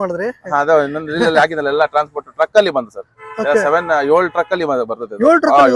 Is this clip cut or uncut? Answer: uncut